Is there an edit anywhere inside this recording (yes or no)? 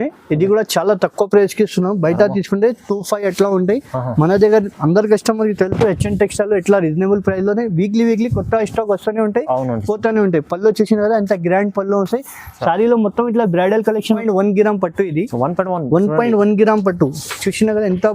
yes